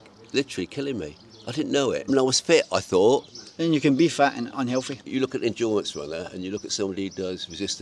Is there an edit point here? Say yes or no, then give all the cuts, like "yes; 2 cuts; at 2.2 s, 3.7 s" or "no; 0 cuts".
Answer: yes; 2 cuts; at 2.1 s, 5.0 s